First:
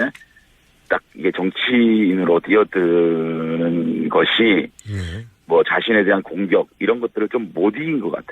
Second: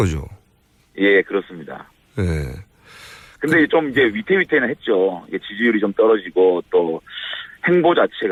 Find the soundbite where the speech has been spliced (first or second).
first